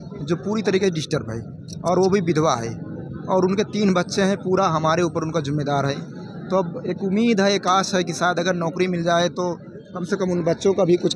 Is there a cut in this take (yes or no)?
no